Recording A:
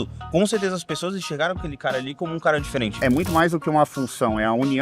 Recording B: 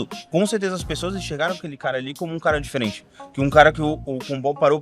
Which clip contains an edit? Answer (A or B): A